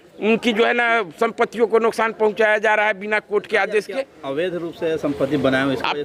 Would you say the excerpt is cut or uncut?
uncut